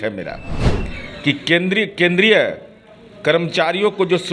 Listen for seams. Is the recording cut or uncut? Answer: uncut